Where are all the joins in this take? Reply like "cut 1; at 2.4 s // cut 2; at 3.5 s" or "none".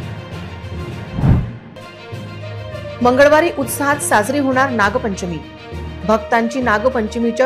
cut 1; at 1.1 s